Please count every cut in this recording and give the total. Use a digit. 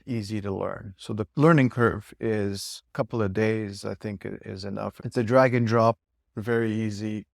3